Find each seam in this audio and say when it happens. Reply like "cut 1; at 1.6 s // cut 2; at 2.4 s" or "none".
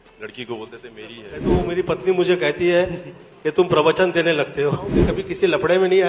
cut 1; at 1.4 s // cut 2; at 5.1 s

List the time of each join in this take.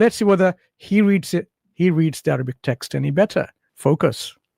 cut 1; at 3.6 s

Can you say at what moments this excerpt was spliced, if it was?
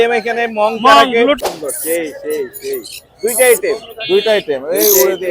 cut 1; at 1.4 s

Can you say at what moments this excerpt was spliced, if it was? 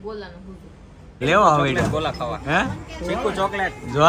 cut 1; at 1.2 s

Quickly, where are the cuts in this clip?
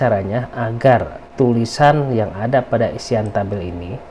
cut 1; at 1.2 s

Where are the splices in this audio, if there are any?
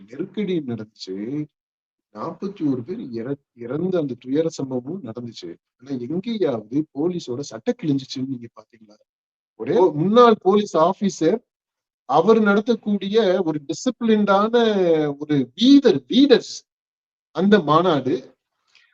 cut 1; at 9.8 s

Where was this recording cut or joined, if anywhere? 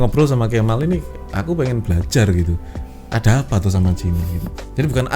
none

